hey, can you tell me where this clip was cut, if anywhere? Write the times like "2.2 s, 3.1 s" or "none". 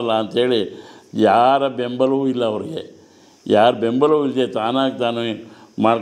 none